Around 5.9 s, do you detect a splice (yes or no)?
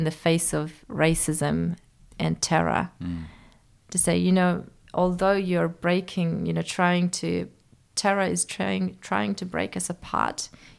no